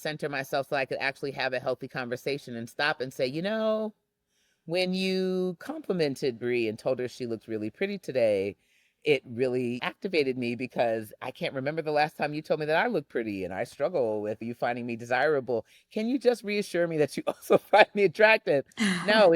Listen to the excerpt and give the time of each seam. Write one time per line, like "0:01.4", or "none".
0:09.8
0:14.4